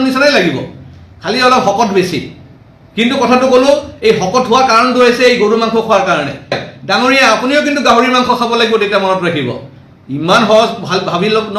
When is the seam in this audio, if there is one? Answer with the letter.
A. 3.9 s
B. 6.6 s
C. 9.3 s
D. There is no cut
B